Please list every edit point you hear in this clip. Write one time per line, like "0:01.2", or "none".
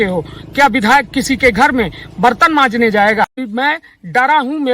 0:03.4

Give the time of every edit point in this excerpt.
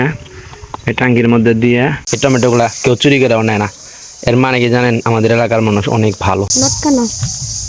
0:02.0
0:06.6

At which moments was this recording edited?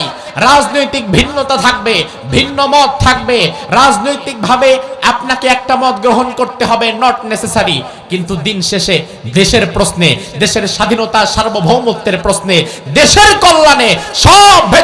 none

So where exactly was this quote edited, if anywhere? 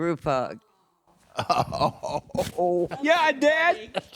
0:02.9

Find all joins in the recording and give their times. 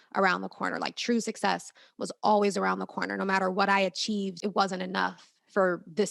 0:04.4

